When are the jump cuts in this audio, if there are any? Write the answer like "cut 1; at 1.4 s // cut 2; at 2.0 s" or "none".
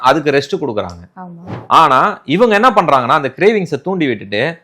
cut 1; at 1.5 s